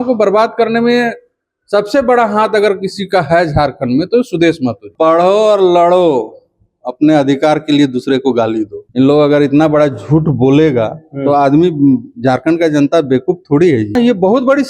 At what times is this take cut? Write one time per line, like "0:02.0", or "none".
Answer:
0:04.8
0:08.8
0:13.9